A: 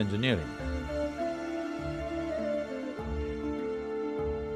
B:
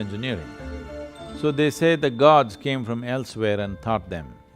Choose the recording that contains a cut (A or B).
B